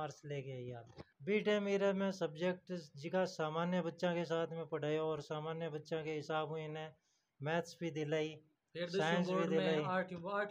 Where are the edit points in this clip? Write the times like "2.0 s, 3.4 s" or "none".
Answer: none